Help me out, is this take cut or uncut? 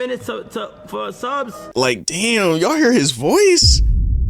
cut